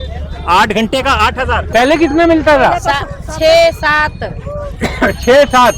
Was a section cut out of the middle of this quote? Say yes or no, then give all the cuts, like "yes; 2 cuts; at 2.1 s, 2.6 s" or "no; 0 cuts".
yes; 1 cut; at 1.6 s